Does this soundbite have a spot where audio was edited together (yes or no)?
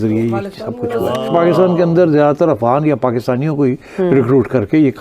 yes